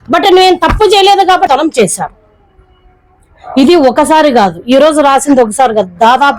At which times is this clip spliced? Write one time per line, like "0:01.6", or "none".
0:01.5

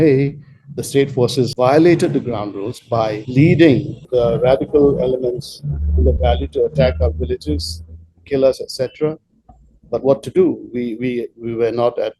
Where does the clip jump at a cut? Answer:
0:01.5
0:03.2
0:04.1

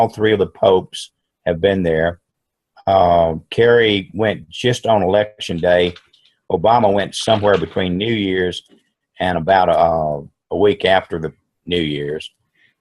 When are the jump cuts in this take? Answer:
0:09.8

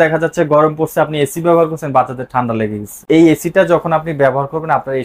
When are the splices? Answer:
0:03.0

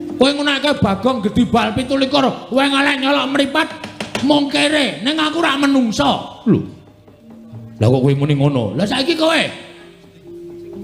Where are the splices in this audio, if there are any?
none

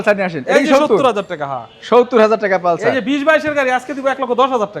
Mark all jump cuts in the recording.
none

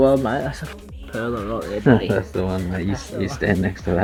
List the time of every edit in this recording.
none

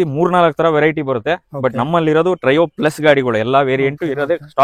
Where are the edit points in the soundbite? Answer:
none

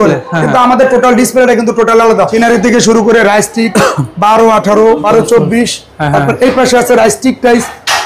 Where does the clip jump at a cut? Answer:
0:02.3
0:05.0

